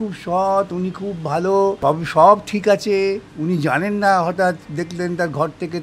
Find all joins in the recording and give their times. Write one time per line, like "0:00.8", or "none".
0:01.8